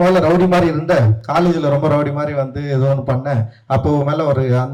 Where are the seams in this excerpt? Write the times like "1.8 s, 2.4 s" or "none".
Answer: none